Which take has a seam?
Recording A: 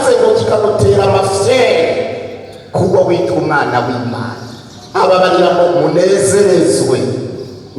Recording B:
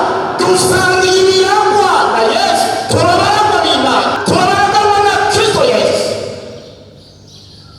B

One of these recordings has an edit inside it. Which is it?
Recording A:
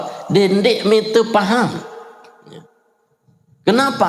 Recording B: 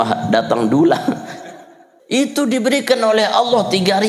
B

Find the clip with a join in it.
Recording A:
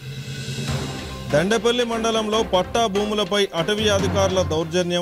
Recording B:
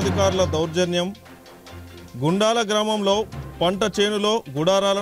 A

